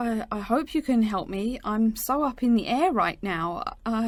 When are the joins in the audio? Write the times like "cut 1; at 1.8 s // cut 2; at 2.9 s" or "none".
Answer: none